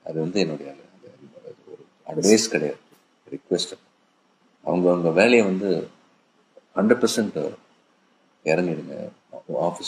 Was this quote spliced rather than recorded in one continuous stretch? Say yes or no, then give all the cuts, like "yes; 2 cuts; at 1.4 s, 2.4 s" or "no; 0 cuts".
no; 0 cuts